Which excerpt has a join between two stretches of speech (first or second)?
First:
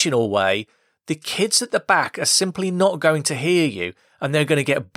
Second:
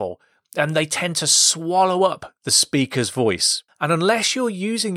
second